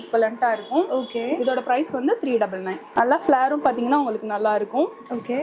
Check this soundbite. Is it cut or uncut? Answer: cut